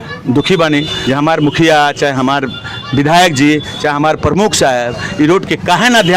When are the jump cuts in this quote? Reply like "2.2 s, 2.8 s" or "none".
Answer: 0.9 s